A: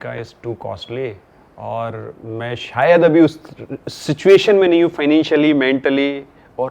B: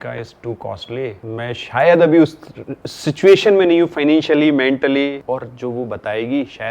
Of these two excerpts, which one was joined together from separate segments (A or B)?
B